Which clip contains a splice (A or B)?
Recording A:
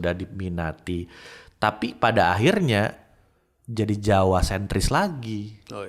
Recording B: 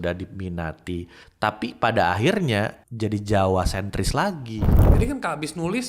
B